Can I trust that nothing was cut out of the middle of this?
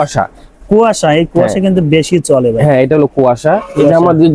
yes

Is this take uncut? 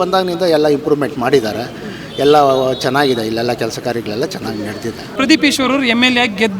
no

